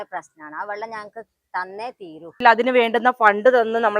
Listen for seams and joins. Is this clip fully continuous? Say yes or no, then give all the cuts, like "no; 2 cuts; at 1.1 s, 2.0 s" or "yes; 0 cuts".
no; 1 cut; at 2.4 s